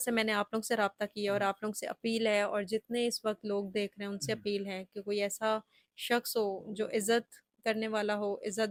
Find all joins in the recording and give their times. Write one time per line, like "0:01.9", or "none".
none